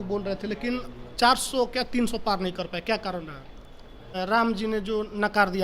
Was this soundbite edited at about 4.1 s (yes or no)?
yes